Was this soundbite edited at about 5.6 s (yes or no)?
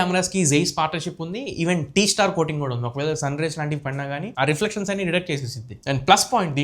yes